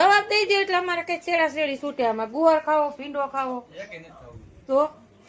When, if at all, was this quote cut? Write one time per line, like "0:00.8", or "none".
none